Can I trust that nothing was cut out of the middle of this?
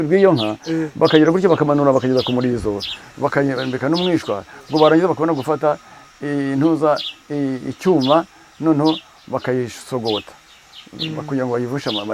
yes; 0 cuts

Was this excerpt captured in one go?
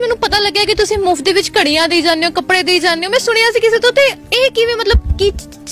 yes; 0 cuts

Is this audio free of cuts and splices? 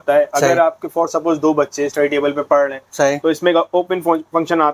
yes; 0 cuts

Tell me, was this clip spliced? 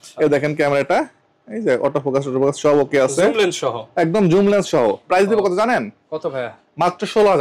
no; 0 cuts

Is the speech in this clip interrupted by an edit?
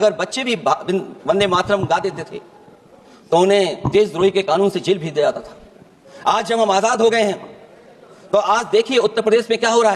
no; 0 cuts

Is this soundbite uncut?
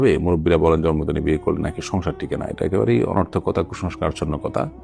yes; 0 cuts

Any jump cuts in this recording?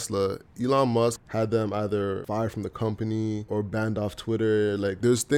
yes; 3 cuts; at 1.2 s, 2.2 s, 3.4 s

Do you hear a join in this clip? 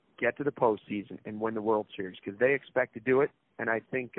no; 0 cuts

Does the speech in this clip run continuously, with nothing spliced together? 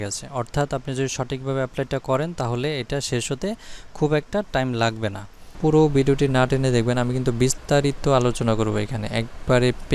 no; 1 cut; at 5.6 s

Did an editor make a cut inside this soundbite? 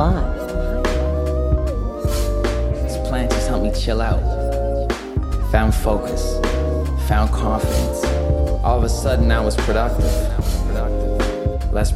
yes; 1 cut; at 2.8 s

